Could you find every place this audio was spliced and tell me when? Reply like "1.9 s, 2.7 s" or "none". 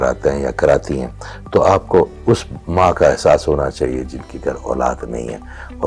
none